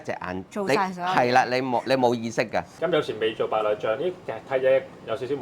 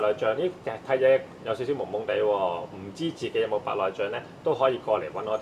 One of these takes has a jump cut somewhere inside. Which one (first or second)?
first